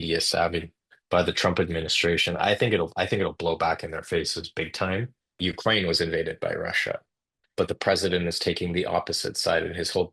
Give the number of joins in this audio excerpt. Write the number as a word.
one